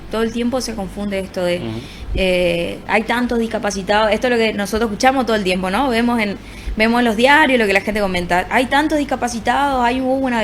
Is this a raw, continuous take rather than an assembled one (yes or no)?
yes